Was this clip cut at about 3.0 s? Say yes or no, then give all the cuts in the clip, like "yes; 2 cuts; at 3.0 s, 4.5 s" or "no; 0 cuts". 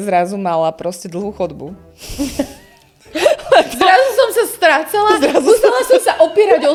no; 0 cuts